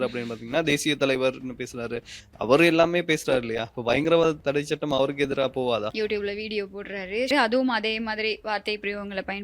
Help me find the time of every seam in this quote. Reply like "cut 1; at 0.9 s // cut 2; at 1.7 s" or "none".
cut 1; at 5.9 s // cut 2; at 7.3 s